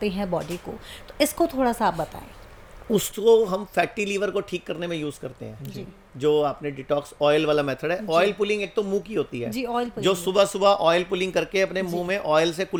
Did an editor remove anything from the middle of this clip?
no; 0 cuts

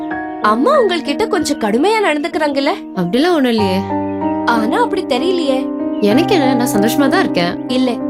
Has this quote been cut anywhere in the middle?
no; 0 cuts

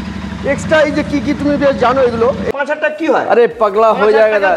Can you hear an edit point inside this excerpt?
yes; 1 cut; at 2.4 s

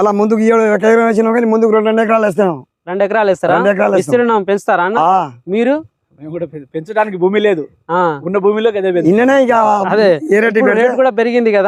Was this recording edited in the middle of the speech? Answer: no; 0 cuts

